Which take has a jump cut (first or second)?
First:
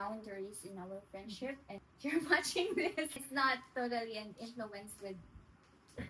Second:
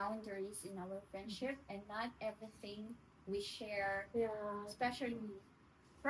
first